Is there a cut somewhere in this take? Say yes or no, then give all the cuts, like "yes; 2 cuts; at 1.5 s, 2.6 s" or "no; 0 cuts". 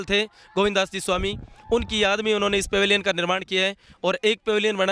no; 0 cuts